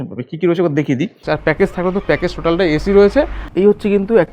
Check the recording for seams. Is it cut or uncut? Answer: cut